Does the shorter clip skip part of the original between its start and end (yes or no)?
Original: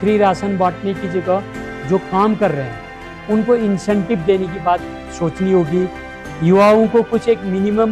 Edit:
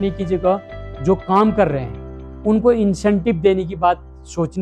no